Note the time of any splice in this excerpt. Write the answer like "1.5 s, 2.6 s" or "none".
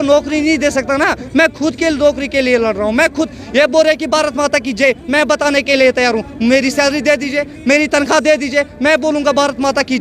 none